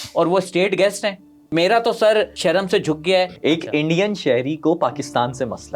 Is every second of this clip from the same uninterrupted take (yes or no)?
no